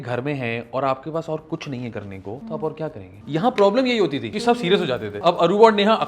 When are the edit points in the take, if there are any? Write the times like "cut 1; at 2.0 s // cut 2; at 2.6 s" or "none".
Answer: cut 1; at 2.4 s // cut 2; at 3.1 s // cut 3; at 4.3 s // cut 4; at 5.1 s